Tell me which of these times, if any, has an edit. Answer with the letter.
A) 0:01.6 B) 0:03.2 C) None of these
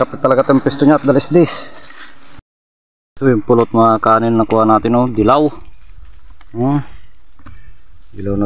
A